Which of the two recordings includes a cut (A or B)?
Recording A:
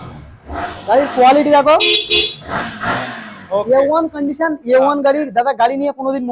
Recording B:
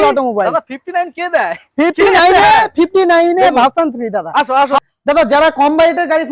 B